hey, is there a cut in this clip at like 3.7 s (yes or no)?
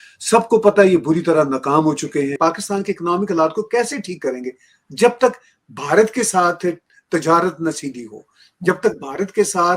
no